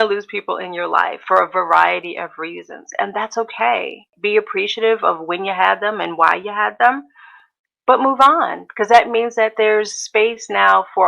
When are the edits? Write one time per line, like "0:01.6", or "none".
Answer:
0:04.1